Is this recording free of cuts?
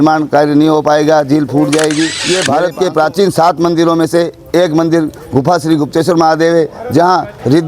no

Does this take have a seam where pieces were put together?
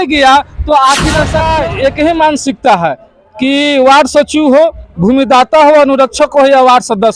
yes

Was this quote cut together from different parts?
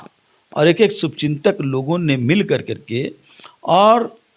no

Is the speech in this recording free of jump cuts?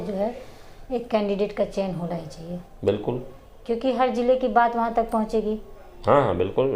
yes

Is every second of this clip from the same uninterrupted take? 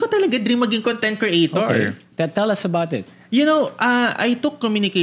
yes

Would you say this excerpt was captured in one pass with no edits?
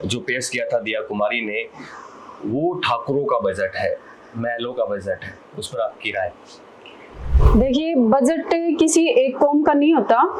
yes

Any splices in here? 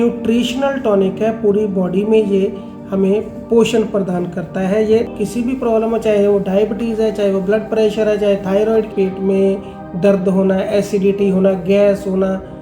yes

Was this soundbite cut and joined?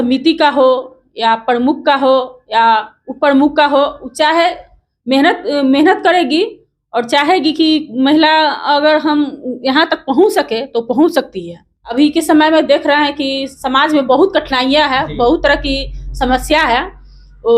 yes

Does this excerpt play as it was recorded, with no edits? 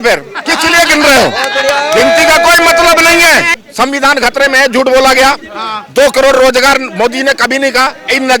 no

